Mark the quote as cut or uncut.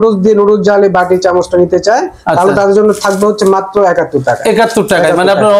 uncut